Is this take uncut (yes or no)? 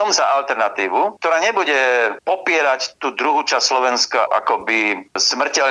no